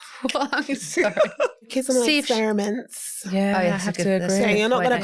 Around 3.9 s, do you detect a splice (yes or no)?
no